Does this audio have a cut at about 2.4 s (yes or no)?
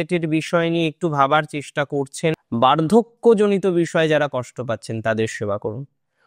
yes